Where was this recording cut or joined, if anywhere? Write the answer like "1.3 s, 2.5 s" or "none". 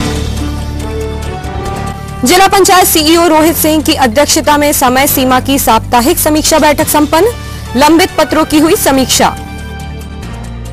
none